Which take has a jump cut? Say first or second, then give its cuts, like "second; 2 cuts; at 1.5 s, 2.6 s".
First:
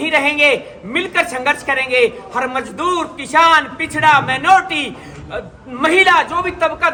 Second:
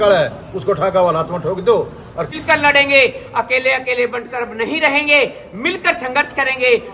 second; 1 cut; at 2.3 s